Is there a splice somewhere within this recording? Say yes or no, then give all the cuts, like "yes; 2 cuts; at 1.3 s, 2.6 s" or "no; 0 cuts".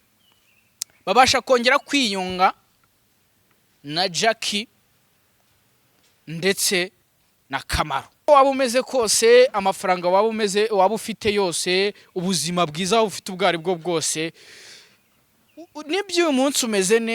yes; 1 cut; at 8.3 s